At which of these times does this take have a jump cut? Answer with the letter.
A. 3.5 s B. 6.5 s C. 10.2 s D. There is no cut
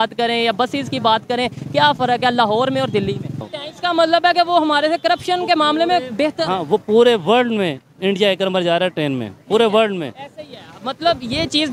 A